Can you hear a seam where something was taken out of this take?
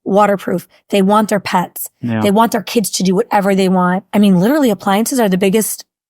yes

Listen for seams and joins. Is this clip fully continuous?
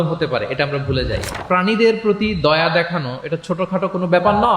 no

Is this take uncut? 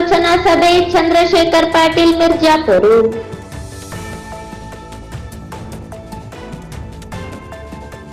yes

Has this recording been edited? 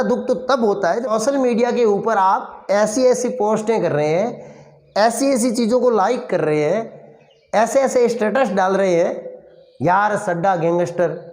yes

